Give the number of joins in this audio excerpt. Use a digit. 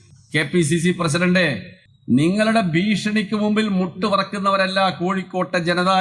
0